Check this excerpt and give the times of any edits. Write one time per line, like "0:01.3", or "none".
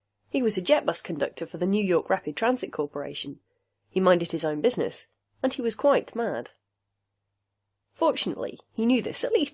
0:06.8